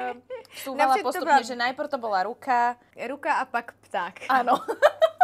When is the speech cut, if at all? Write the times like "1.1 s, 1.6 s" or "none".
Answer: 2.9 s

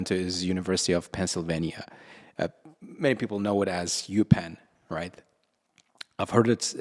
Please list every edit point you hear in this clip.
none

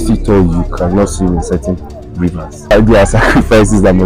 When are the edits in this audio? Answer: 2.7 s

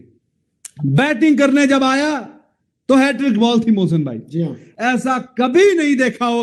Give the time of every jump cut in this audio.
4.6 s

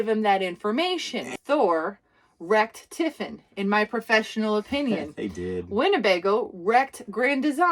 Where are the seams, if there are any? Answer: 1.2 s

